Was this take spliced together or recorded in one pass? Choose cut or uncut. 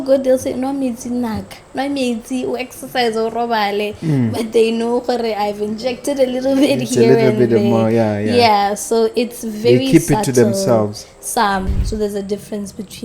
cut